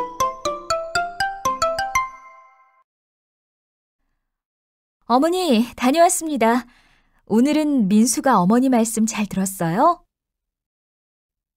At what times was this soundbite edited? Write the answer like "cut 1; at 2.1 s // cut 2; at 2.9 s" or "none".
cut 1; at 7.5 s